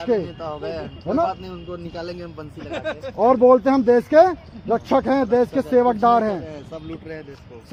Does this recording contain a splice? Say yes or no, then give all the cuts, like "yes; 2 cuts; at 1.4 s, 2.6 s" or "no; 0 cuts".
no; 0 cuts